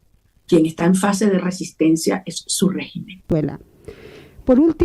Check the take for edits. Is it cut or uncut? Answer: cut